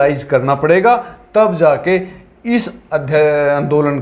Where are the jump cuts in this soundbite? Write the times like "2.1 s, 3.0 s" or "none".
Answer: none